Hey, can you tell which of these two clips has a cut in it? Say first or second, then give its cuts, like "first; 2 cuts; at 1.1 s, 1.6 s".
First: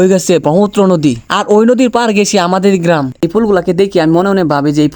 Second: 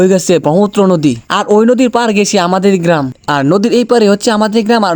first; 1 cut; at 3.2 s